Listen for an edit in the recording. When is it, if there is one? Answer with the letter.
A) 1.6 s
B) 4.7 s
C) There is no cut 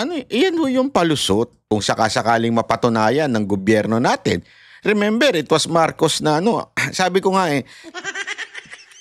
A